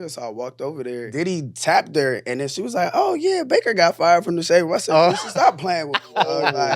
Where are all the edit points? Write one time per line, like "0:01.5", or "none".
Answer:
0:01.1